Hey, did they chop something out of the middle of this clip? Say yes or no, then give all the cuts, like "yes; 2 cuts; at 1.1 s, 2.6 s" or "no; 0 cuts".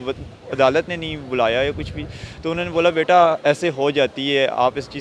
no; 0 cuts